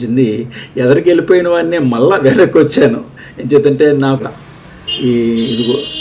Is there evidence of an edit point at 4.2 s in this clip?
yes; 1 cut; at 4.2 s

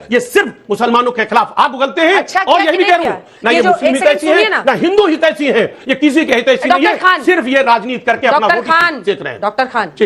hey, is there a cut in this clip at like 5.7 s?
no; 0 cuts

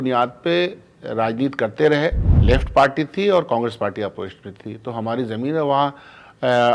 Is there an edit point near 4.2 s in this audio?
no; 1 cut; at 2.3 s

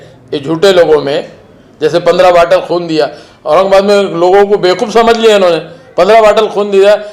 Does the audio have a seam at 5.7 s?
no; 0 cuts

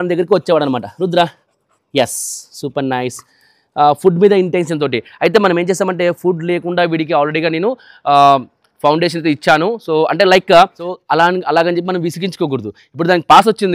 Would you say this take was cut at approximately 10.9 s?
yes; 1 cut; at 10.9 s

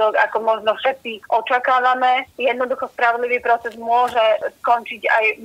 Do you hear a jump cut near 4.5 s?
no; 1 cut; at 2.3 s

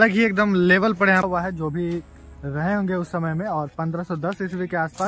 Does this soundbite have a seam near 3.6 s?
no; 1 cut; at 1.3 s

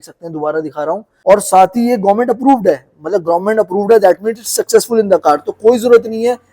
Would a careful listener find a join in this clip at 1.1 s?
yes; 1 cut; at 1.1 s

